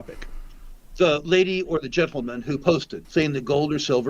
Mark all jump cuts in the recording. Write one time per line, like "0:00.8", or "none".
0:03.0